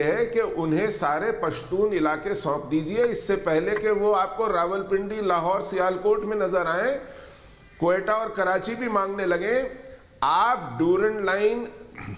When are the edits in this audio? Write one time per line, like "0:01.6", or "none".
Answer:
none